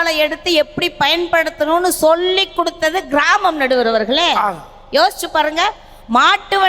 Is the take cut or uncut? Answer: uncut